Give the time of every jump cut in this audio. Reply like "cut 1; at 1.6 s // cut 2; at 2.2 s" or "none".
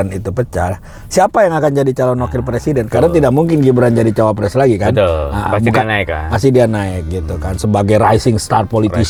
none